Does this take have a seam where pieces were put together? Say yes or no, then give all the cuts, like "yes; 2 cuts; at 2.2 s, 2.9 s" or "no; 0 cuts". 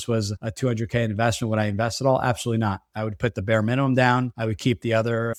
no; 0 cuts